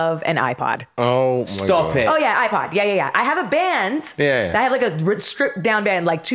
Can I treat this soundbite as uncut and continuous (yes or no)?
yes